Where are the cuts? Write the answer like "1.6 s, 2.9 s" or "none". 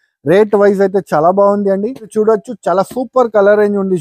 2.1 s